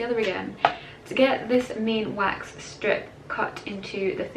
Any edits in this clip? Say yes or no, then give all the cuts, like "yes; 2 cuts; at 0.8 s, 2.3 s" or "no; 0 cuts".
no; 0 cuts